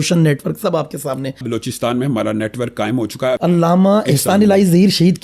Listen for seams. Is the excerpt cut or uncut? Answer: cut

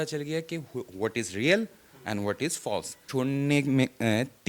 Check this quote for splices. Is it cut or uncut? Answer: cut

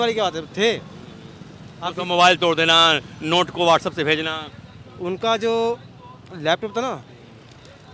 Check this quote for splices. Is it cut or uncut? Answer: uncut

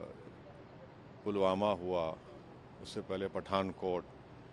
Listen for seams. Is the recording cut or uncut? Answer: uncut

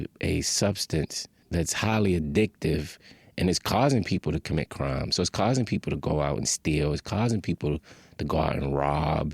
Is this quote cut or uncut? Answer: cut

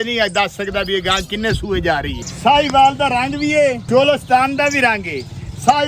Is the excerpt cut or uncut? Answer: cut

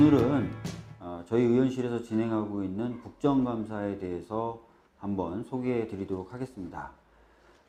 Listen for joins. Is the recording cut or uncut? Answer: uncut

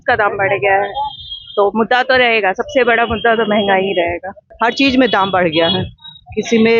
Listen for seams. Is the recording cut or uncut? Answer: cut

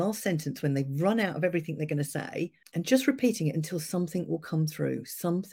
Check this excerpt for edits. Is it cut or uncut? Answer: cut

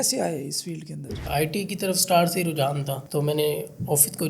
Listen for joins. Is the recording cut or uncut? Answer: cut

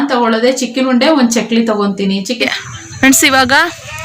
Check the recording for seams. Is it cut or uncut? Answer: cut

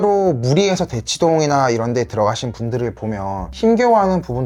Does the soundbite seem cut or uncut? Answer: uncut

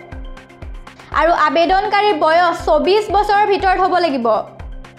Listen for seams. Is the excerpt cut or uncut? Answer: uncut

